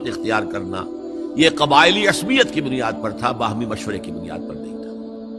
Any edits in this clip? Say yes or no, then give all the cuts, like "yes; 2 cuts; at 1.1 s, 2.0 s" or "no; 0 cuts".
yes; 1 cut; at 4.1 s